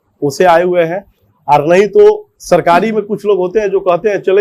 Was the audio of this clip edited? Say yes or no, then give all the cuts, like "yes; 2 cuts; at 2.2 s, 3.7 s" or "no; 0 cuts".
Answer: no; 0 cuts